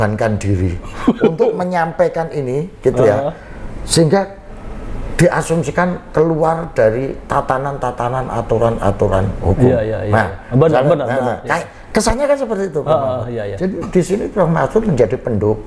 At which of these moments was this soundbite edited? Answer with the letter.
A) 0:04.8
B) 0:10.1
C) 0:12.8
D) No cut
D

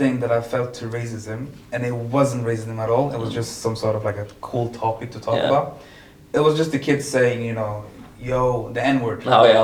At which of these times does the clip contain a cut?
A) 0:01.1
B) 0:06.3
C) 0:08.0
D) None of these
D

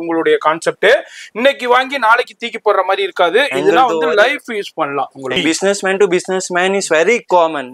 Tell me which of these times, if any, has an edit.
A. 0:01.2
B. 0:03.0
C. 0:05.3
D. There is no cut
C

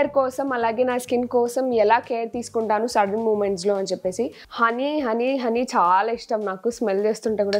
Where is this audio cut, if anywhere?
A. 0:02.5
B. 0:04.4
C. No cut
B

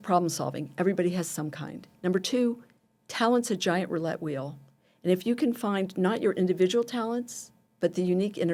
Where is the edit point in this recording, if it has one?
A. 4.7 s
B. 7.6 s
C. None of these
C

